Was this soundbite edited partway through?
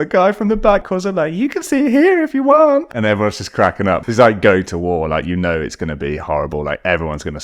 yes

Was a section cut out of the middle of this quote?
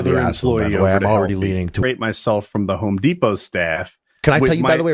yes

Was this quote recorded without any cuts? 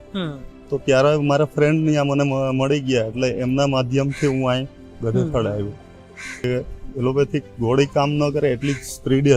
no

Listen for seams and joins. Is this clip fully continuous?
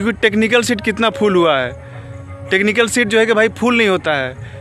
yes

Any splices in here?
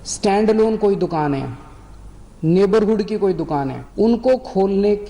yes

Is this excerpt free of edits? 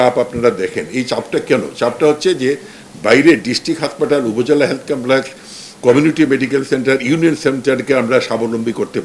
yes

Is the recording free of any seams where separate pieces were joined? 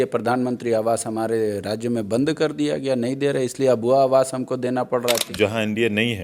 no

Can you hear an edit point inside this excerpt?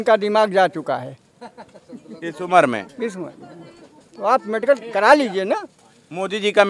no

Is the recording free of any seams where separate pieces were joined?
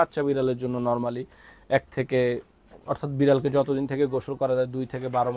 yes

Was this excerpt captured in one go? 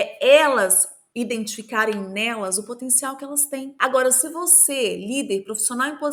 yes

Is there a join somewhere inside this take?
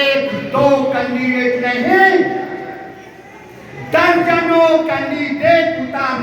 no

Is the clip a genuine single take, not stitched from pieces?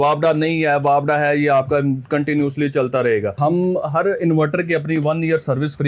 no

